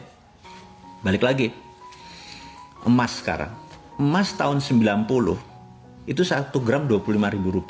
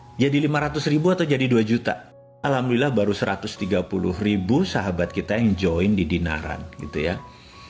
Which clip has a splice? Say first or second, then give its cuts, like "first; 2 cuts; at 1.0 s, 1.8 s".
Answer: second; 1 cut; at 2.4 s